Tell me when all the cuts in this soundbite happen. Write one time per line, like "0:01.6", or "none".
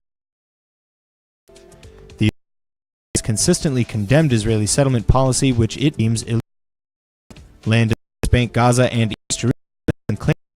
0:06.6

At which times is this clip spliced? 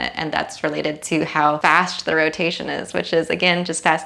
0:01.6

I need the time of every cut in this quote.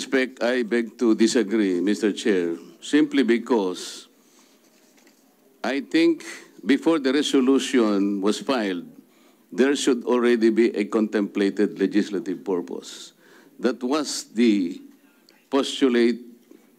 none

